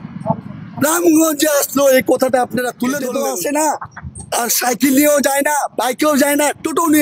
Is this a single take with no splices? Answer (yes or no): no